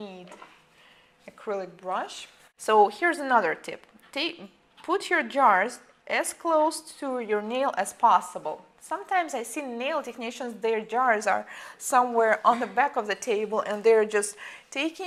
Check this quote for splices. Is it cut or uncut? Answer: uncut